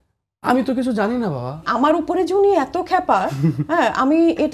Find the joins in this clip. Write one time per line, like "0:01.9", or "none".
0:01.7